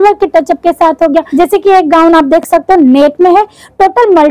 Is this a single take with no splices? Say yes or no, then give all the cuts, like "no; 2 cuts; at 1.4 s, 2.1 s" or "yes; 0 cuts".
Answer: no; 1 cut; at 1.3 s